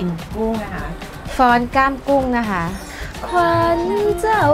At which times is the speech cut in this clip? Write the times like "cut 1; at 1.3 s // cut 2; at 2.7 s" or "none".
none